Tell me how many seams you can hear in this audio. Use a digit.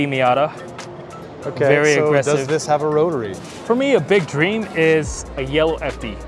1